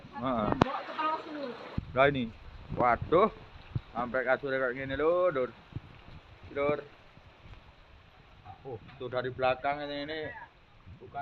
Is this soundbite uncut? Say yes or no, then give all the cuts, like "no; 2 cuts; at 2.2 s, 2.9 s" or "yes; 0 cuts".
yes; 0 cuts